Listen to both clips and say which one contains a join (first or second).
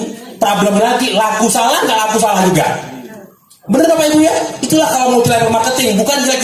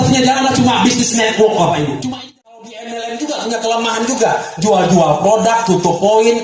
second